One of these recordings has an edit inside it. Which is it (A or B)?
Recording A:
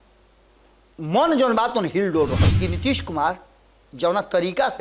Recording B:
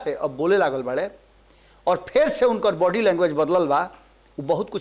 A